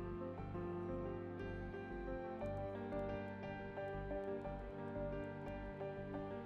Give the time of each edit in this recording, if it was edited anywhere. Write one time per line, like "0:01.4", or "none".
none